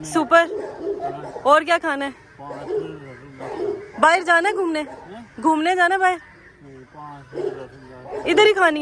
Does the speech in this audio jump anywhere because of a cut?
no; 0 cuts

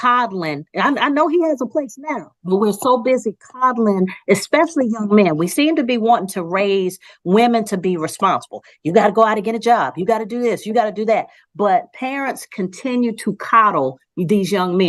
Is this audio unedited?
yes; 0 cuts

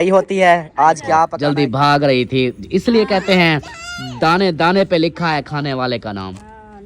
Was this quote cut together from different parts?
yes; 1 cut; at 1.4 s

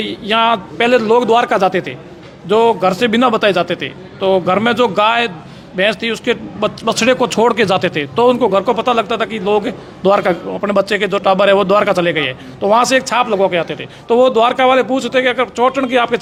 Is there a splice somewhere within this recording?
no; 0 cuts

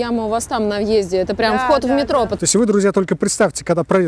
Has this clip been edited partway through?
yes; 1 cut; at 2.4 s

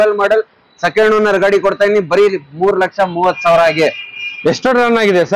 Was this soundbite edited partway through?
no; 0 cuts

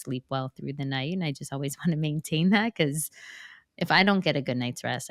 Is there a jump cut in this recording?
no; 0 cuts

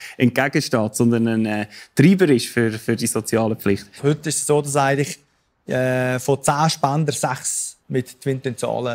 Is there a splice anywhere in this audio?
yes; 1 cut; at 3.9 s

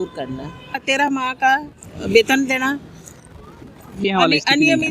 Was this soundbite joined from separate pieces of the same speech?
yes; 1 cut; at 4.0 s

